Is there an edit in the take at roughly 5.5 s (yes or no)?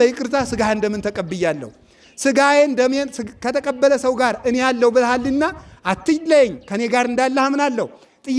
no